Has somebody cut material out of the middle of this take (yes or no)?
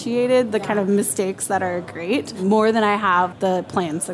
yes